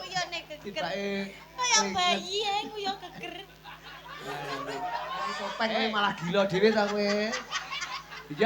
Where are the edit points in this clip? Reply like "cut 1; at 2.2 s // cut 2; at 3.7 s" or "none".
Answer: cut 1; at 5.5 s